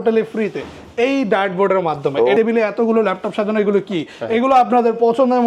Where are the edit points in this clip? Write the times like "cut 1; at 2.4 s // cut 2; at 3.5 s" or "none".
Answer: cut 1; at 2.4 s